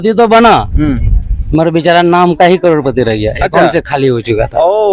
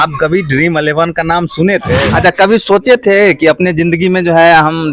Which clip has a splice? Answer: second; 1 cut; at 2.0 s

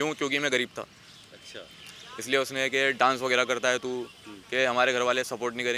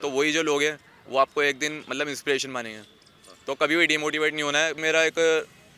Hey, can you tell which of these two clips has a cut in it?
second; 1 cut; at 4.8 s

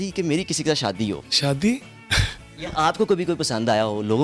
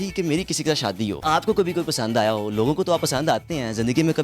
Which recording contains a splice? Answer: second; 1 cut; at 1.2 s

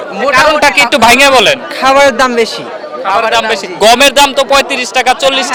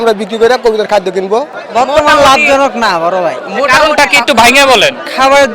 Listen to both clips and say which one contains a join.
second; 1 cut; at 1.6 s

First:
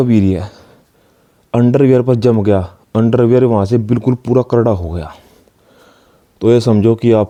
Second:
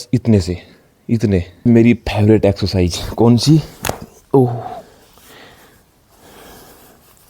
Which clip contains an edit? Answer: second; 1 cut; at 1.7 s

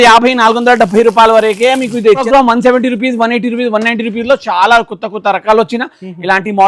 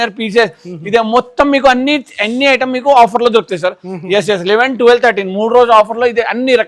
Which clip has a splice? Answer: first; 1 cut; at 2.2 s

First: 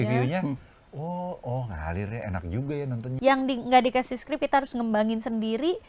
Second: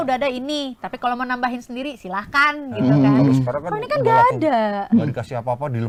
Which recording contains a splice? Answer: first; 1 cut; at 3.0 s

